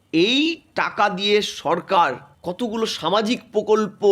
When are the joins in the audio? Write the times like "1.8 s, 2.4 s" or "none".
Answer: 2.3 s